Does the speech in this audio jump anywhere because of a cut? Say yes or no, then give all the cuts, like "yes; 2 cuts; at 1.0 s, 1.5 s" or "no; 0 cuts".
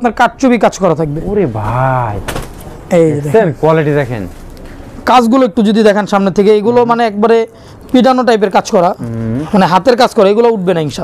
no; 0 cuts